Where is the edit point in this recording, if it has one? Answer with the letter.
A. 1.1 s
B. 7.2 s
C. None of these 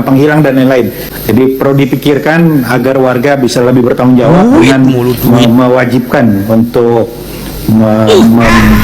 A